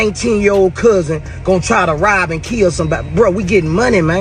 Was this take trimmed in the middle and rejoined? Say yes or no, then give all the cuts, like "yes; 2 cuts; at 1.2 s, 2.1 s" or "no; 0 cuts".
no; 0 cuts